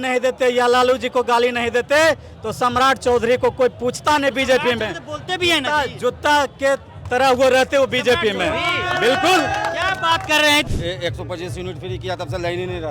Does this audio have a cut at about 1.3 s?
no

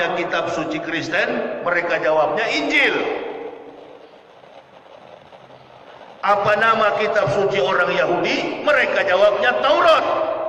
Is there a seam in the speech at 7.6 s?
no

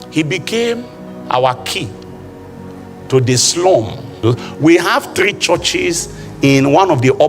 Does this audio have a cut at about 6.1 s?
no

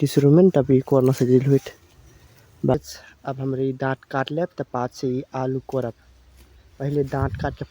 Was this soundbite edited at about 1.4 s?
no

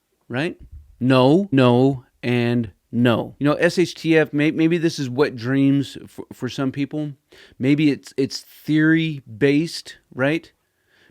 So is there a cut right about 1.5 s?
yes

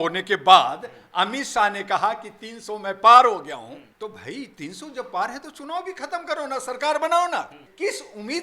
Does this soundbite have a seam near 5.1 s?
no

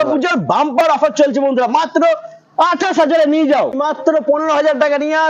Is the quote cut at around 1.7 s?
no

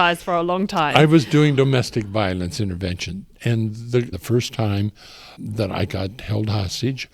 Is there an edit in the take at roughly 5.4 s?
yes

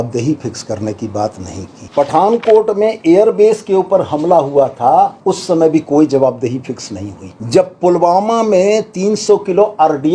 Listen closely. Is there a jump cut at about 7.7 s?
no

